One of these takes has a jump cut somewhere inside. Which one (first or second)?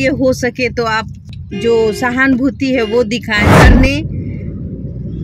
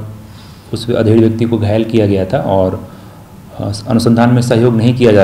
first